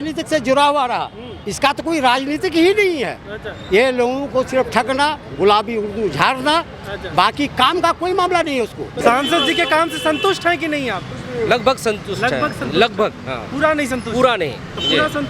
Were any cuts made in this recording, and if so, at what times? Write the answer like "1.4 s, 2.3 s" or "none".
8.9 s